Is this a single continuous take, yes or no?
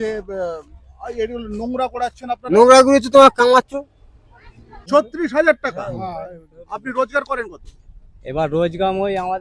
no